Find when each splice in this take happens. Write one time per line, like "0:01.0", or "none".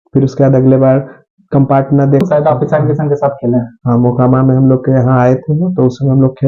0:02.2